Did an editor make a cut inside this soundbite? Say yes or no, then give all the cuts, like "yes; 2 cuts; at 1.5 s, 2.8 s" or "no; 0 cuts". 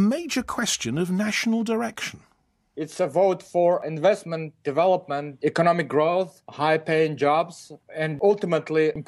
yes; 1 cut; at 3.8 s